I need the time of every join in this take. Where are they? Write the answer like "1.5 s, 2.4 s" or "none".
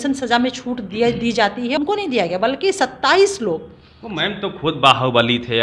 1.8 s